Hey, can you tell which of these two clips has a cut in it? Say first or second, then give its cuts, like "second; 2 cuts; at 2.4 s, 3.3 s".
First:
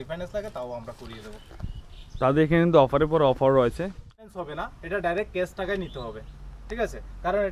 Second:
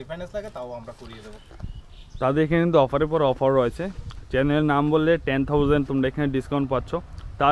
first; 1 cut; at 4.2 s